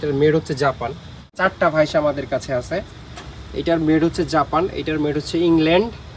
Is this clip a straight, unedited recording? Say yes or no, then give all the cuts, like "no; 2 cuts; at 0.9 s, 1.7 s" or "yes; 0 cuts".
no; 1 cut; at 1.3 s